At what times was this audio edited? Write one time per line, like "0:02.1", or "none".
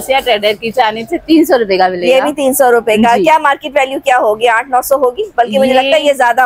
none

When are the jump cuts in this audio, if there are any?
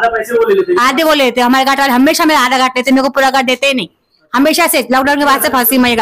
none

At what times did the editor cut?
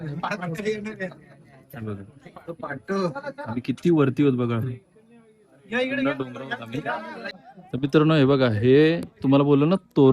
0:07.3

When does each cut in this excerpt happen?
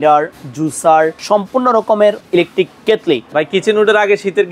0:01.2
0:02.2
0:03.3

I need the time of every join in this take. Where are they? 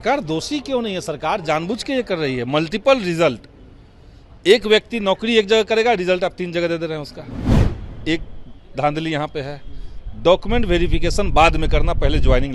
none

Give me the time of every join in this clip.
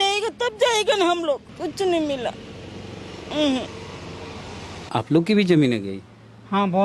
0:01.5
0:04.8

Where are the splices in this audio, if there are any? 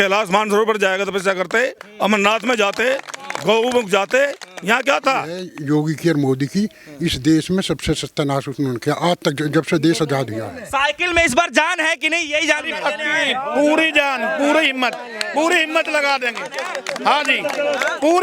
0:05.5
0:10.5

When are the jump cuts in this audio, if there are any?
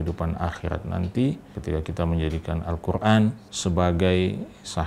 0:01.5
0:03.5

